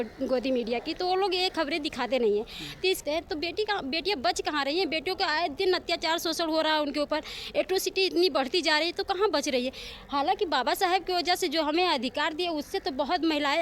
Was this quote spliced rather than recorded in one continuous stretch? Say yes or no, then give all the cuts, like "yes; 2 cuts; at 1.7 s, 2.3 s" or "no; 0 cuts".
yes; 1 cut; at 3.0 s